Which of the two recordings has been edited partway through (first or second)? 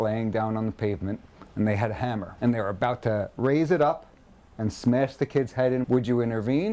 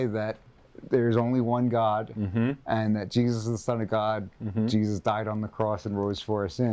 first